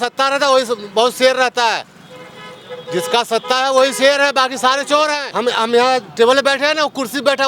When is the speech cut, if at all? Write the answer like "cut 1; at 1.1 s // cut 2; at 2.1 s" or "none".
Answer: cut 1; at 5.3 s

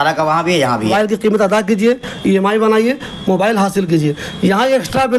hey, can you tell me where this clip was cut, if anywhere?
cut 1; at 0.9 s

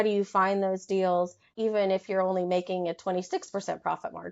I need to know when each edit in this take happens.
cut 1; at 1.4 s

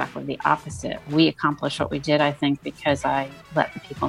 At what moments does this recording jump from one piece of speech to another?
none

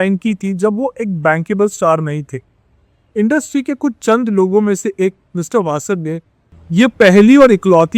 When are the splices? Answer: cut 1; at 6.6 s

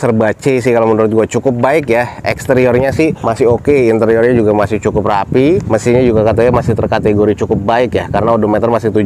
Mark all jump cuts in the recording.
cut 1; at 3.2 s // cut 2; at 5.6 s

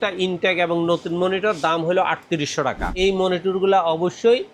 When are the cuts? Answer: cut 1; at 2.9 s

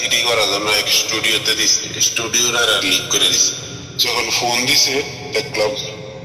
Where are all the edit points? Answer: cut 1; at 3.9 s

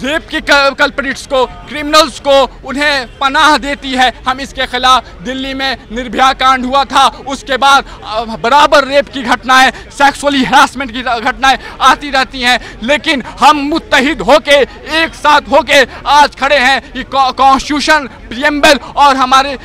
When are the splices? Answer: none

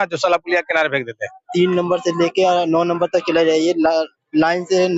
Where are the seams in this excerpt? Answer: cut 1; at 1.4 s

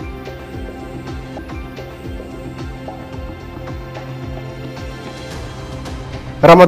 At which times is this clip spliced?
cut 1; at 1.1 s

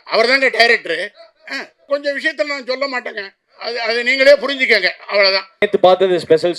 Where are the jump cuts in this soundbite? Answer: cut 1; at 1.9 s // cut 2; at 5.6 s

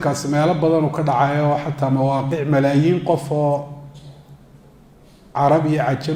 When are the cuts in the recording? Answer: none

